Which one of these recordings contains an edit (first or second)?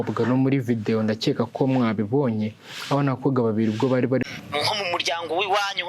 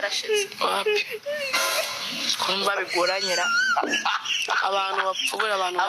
first